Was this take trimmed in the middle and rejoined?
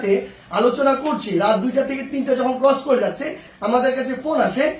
yes; 1 cut; at 3.5 s

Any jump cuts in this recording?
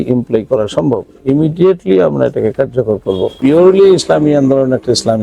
yes; 1 cut; at 3.4 s

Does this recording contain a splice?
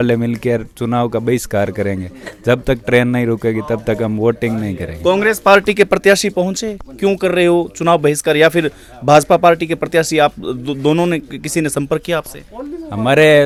no; 0 cuts

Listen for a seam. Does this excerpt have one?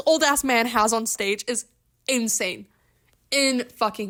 no; 0 cuts

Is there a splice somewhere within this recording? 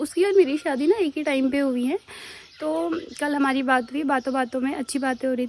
no; 0 cuts

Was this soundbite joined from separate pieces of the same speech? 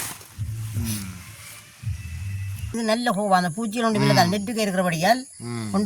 yes; 1 cut; at 2.7 s

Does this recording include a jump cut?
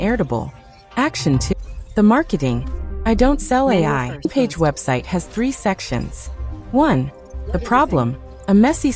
yes; 2 cuts; at 1.5 s, 4.3 s

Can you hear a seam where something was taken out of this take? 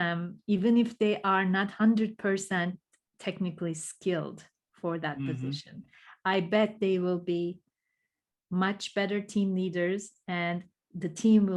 no; 0 cuts

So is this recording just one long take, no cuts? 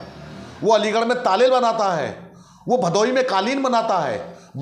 yes; 0 cuts

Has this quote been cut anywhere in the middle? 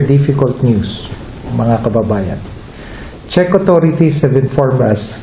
no; 0 cuts

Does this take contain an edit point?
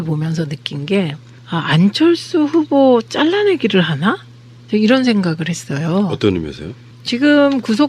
yes; 1 cut; at 4.3 s

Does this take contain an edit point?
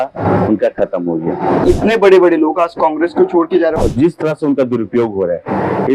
yes; 2 cuts; at 1.6 s, 3.8 s

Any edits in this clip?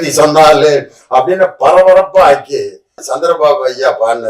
yes; 1 cut; at 3.1 s

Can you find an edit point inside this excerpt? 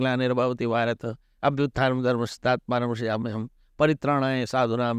no; 0 cuts

